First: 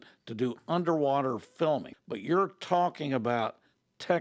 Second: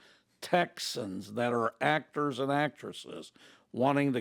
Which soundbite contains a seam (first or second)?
first